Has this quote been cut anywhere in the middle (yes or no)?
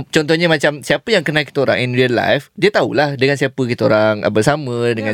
no